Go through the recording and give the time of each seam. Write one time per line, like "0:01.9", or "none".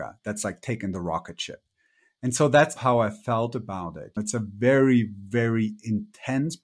0:02.8
0:04.2